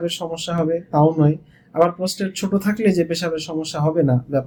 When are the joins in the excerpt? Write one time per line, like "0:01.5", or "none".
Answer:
none